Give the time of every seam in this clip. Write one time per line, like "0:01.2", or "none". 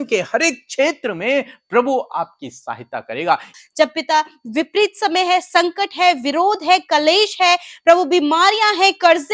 0:03.5